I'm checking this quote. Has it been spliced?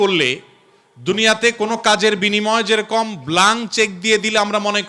no; 0 cuts

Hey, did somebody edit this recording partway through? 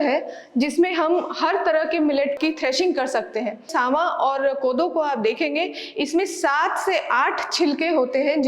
yes; 1 cut; at 3.7 s

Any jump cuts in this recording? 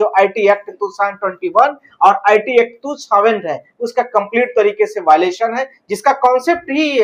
no; 0 cuts

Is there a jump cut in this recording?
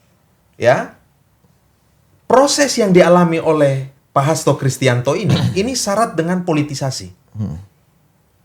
no; 0 cuts

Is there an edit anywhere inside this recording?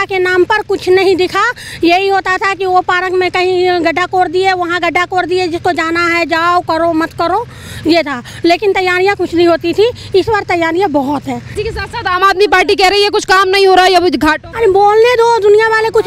yes; 1 cut; at 11.5 s

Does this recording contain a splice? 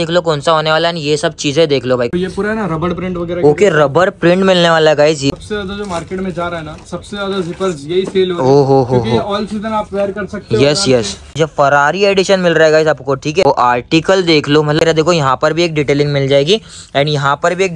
yes; 5 cuts; at 2.1 s, 5.3 s, 11.3 s, 13.4 s, 14.8 s

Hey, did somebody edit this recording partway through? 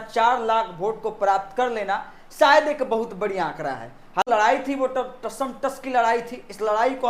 yes; 1 cut; at 4.2 s

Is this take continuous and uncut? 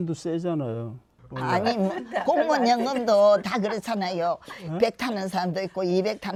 yes; 0 cuts

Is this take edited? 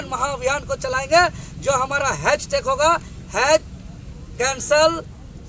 no; 0 cuts

